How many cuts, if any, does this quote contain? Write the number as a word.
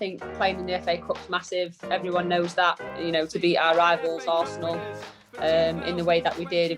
one